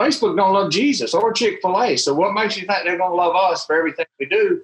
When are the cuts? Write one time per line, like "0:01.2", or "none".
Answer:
none